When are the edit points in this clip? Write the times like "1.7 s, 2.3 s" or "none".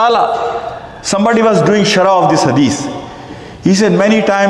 1.0 s